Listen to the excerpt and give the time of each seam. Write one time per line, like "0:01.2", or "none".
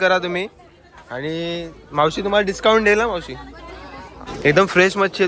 0:04.3